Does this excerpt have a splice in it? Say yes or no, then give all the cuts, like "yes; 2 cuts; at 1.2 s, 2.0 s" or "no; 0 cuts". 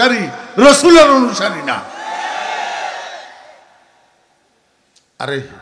no; 0 cuts